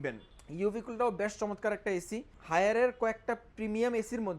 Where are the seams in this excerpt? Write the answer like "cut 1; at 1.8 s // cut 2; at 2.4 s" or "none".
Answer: cut 1; at 2.3 s

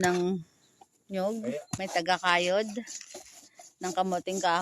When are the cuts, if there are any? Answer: cut 1; at 1.7 s

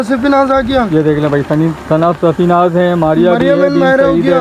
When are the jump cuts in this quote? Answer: none

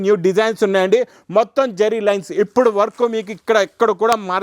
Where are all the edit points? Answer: none

